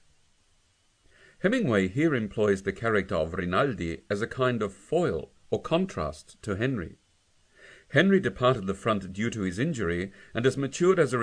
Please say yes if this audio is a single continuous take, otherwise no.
no